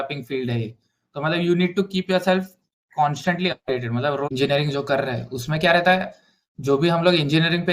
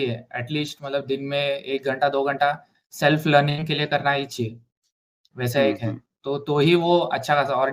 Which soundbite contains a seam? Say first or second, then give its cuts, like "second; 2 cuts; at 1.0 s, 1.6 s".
first; 1 cut; at 4.3 s